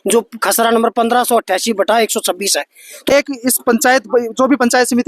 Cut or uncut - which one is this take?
cut